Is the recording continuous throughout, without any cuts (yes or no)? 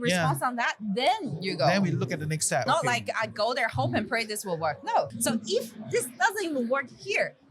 no